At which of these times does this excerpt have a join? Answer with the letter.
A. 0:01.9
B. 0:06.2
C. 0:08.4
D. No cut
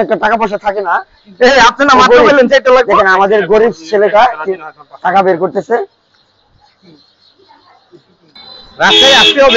C